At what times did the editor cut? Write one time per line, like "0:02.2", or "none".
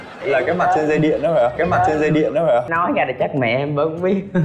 0:02.7

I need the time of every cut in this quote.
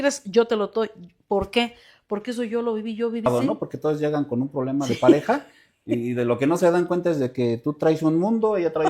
0:03.3

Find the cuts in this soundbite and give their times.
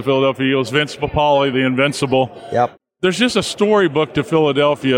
0:02.8

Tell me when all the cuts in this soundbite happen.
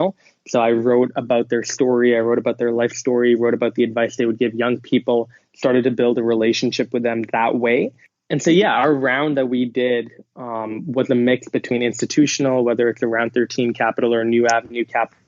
0:08.1

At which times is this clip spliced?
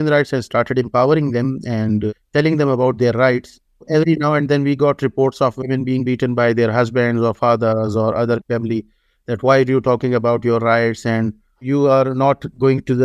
0:02.1
0:03.8
0:08.4
0:11.6

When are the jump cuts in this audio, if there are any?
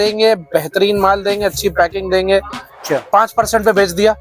0:02.8

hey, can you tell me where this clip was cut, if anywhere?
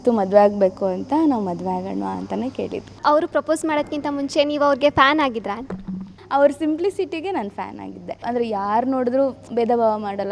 0:03.0
0:06.2
0:08.2

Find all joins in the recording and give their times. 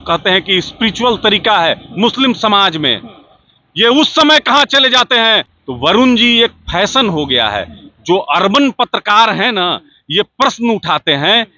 0:05.6

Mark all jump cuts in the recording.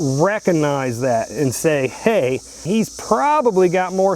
0:02.6

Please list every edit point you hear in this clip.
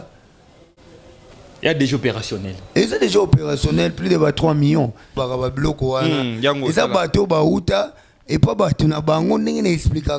0:05.2

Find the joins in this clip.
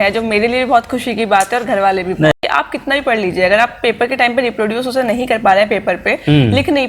0:02.3

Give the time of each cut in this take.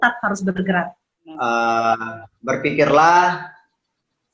0:01.4

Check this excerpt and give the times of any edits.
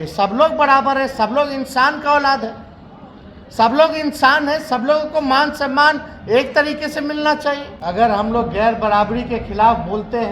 0:07.7

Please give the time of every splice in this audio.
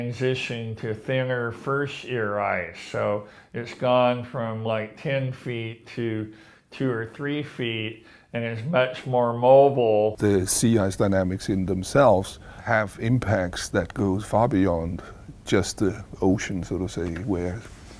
0:08.6

